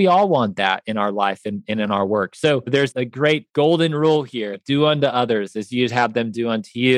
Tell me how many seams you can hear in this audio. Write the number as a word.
one